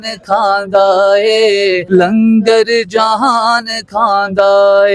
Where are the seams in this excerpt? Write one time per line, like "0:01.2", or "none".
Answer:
0:01.8